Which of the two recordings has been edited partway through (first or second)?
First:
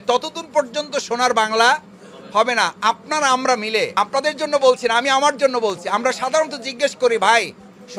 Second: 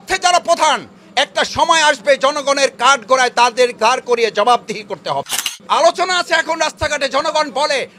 second